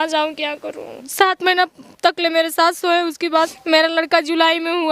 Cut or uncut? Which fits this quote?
cut